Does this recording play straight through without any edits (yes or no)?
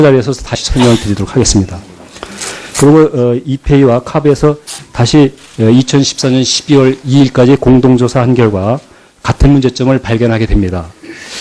no